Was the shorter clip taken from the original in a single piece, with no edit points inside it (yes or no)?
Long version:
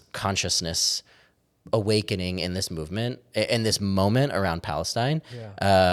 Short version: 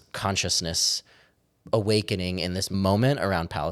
no